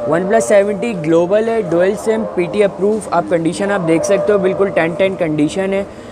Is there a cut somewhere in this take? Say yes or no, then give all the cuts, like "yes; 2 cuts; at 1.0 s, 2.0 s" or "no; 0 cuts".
no; 0 cuts